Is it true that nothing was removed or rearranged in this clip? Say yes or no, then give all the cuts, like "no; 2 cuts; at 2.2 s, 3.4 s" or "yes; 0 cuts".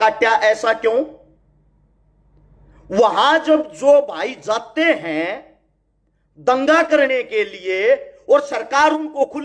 yes; 0 cuts